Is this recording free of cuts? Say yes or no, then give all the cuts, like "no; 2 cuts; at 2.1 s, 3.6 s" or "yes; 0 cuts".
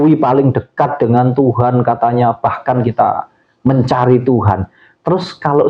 yes; 0 cuts